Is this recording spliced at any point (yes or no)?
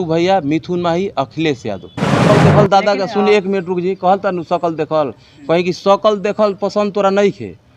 yes